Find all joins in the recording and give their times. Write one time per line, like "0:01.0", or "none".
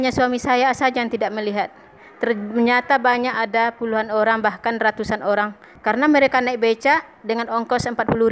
0:05.6